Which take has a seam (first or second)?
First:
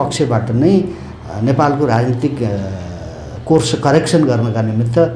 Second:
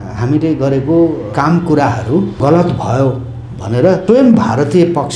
second